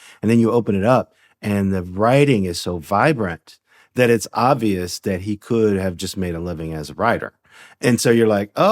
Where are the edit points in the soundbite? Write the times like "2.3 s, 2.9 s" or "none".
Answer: 7.8 s